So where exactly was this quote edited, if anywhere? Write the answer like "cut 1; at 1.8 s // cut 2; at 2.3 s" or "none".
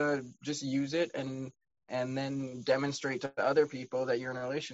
none